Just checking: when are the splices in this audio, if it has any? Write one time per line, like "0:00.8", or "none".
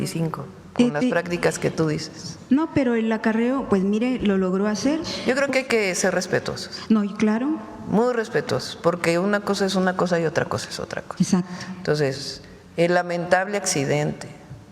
0:05.1